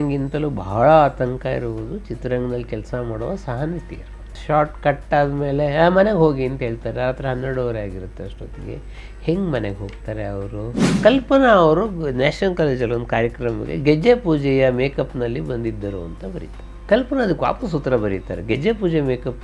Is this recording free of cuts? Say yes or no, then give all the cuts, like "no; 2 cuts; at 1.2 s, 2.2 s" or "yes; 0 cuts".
no; 2 cuts; at 4.4 s, 10.9 s